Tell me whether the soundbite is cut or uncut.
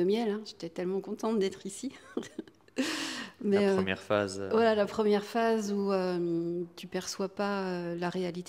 uncut